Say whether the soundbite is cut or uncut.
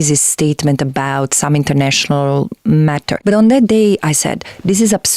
cut